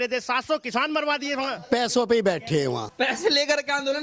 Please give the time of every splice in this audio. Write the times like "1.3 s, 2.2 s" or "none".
1.6 s, 2.9 s